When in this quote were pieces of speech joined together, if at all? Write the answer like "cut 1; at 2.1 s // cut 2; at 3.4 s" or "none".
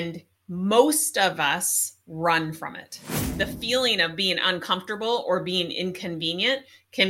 cut 1; at 3.2 s